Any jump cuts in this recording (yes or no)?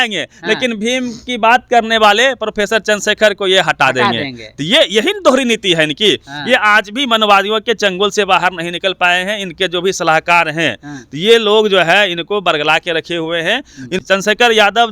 yes